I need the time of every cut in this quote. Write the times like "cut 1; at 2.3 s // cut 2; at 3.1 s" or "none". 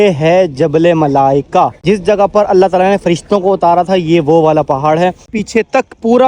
cut 1; at 1.8 s // cut 2; at 5.1 s